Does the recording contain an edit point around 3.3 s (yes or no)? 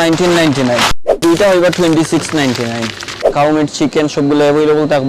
yes